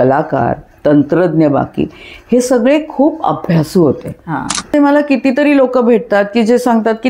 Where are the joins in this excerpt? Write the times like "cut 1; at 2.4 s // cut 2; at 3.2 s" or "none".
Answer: cut 1; at 4.7 s